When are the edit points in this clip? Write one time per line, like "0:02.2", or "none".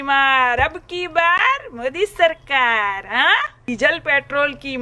0:03.7